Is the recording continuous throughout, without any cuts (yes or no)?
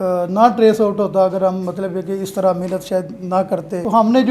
yes